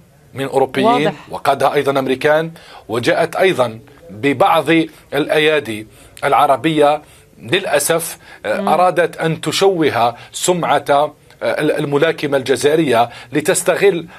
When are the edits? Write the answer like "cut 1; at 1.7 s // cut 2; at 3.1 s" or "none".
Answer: none